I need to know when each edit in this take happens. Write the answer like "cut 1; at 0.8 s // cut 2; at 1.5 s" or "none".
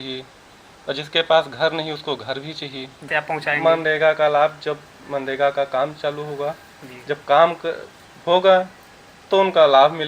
cut 1; at 3.1 s